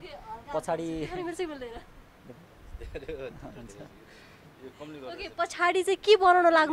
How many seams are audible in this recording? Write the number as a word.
zero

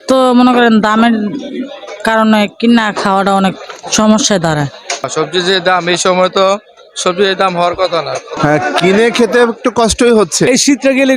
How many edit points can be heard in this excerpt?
three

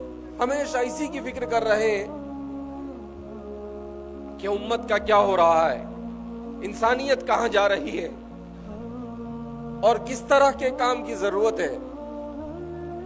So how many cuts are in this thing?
three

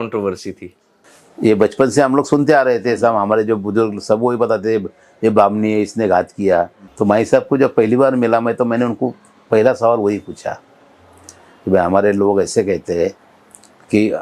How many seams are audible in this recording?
one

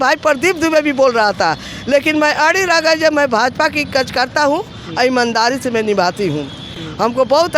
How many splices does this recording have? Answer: zero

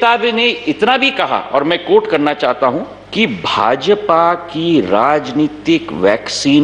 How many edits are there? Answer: one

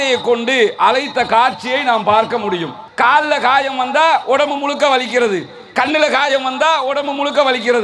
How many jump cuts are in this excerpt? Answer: one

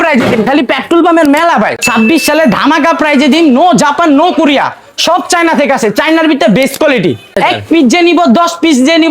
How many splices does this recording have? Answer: two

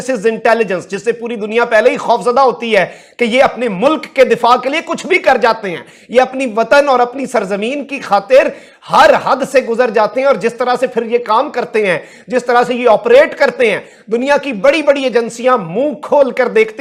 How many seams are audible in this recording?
zero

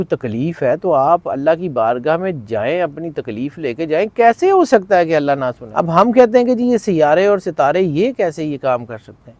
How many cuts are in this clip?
one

